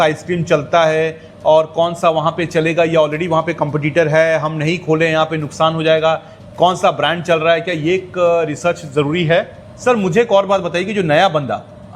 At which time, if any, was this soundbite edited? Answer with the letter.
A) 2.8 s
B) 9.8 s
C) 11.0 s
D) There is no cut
B